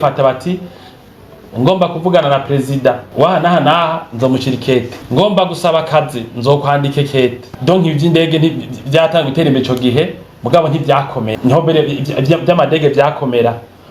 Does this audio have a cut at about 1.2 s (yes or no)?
no